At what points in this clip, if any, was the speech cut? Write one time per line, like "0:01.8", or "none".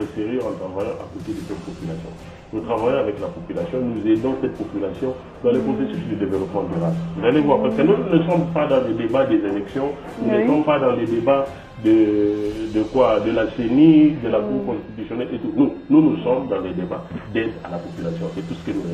none